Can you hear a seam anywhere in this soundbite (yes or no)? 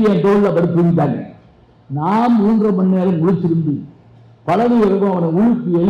no